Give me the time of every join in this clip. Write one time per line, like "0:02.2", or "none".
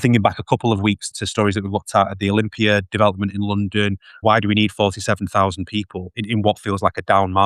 0:01.1
0:04.2
0:06.2

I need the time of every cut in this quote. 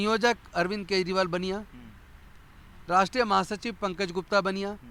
none

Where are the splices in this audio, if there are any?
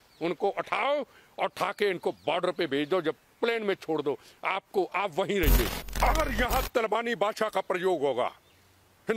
0:05.8

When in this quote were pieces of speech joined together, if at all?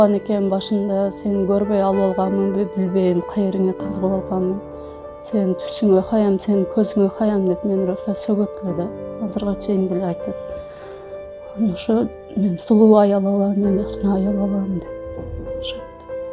none

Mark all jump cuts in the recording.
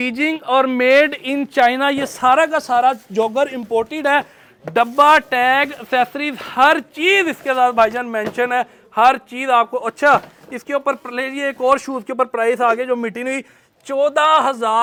none

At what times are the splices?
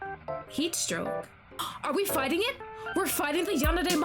0:01.6

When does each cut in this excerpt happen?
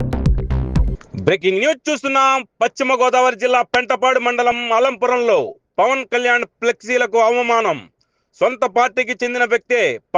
0:00.9

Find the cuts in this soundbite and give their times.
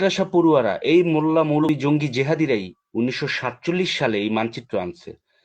0:01.6

